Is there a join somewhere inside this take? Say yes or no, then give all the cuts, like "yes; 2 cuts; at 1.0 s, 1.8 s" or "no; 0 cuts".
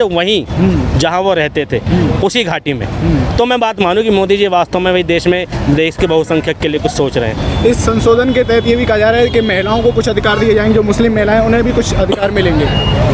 no; 0 cuts